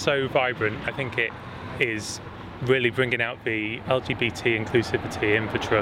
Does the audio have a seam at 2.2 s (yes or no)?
no